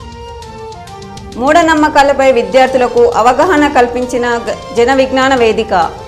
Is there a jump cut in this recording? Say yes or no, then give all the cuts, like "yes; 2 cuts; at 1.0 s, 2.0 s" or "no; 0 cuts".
yes; 1 cut; at 1.1 s